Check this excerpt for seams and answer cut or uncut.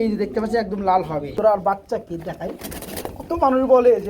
cut